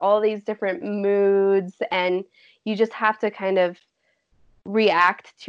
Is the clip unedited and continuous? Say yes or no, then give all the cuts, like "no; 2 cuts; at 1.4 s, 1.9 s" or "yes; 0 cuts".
yes; 0 cuts